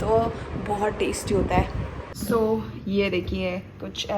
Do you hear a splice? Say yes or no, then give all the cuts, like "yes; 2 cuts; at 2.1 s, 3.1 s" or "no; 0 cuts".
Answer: yes; 1 cut; at 2.1 s